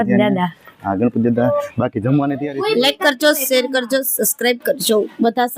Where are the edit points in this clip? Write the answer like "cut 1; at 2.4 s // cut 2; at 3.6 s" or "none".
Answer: cut 1; at 2.5 s